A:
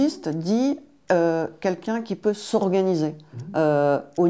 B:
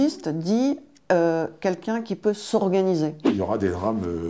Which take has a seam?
B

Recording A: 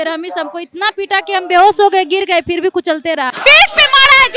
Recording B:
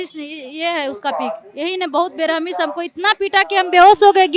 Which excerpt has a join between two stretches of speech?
A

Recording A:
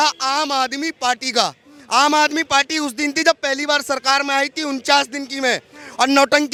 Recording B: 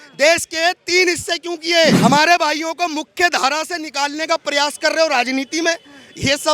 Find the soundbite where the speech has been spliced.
B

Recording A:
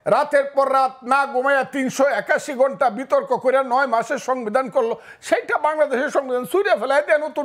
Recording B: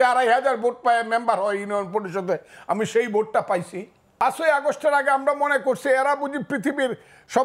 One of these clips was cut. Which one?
B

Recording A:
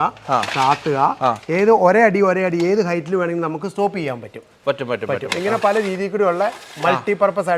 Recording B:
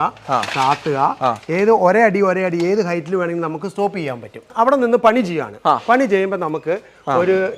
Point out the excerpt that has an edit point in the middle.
B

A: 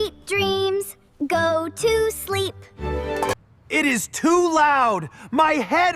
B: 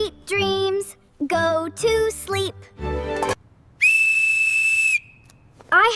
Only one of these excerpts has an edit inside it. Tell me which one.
A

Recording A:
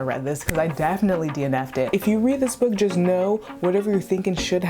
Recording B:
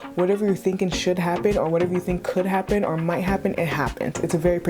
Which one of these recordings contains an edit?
A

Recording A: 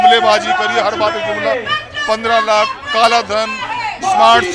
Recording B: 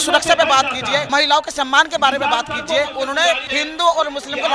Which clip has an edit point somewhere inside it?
B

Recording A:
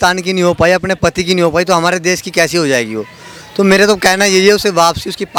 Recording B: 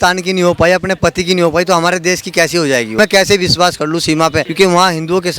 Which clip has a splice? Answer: B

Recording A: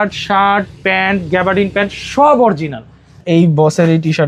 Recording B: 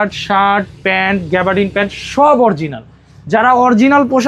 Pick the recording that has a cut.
A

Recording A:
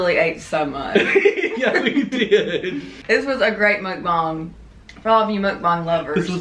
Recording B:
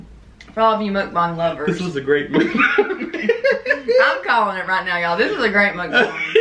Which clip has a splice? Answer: A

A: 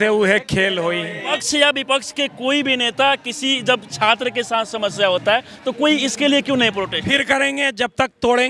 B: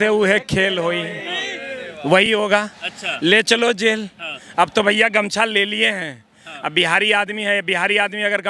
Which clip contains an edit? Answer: A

